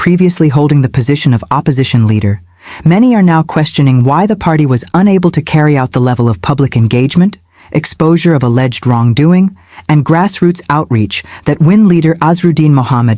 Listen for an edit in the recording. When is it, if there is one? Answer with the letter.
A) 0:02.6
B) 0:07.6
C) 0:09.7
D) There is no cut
D